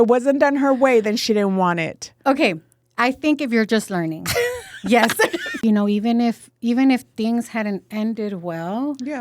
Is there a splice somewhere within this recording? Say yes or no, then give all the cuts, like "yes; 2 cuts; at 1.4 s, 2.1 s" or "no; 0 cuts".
yes; 1 cut; at 5.5 s